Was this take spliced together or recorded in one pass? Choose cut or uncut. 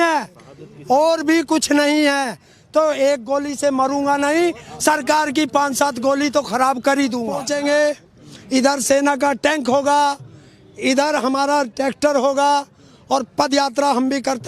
cut